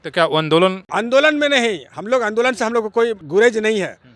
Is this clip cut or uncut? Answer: cut